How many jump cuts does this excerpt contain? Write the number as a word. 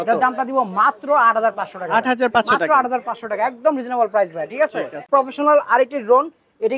one